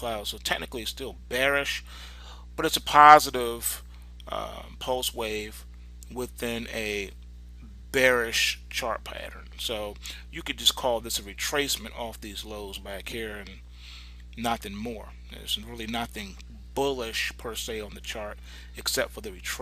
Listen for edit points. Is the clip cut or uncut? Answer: uncut